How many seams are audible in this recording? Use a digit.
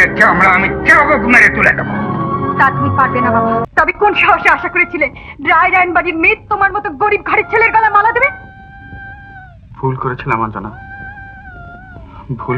1